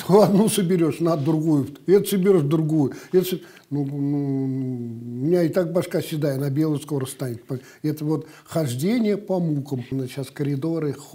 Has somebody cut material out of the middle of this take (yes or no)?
yes